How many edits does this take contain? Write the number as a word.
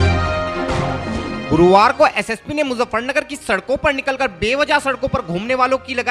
one